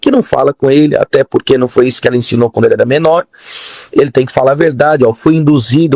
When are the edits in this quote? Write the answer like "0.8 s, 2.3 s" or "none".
3.3 s